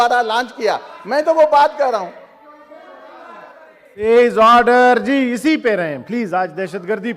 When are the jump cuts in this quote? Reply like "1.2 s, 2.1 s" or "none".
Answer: none